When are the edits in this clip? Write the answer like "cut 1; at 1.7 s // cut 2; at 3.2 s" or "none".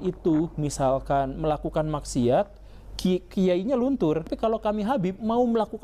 cut 1; at 4.3 s